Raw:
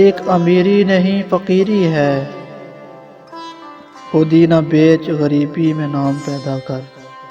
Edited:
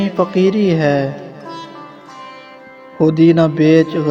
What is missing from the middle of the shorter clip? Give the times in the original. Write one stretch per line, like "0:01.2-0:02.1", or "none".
none